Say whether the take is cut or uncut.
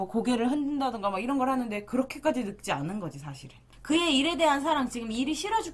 cut